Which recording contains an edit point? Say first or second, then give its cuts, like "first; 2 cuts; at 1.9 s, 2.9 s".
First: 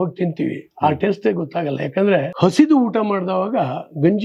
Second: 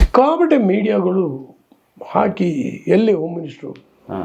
first; 1 cut; at 2.3 s